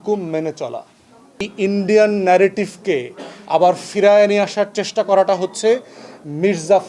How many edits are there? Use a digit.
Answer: 1